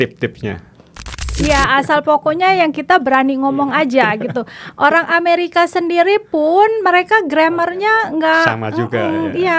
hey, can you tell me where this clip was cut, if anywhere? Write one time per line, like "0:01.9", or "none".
0:00.9